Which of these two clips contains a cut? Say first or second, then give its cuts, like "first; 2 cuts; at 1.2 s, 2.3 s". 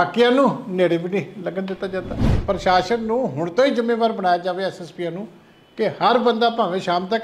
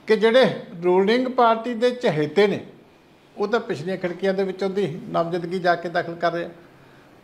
first; 1 cut; at 2.3 s